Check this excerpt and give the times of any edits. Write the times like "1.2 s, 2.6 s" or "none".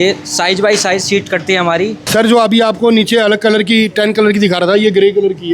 2.3 s